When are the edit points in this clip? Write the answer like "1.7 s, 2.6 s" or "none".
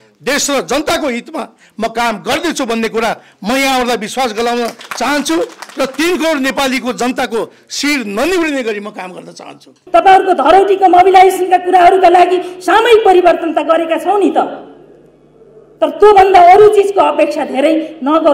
9.8 s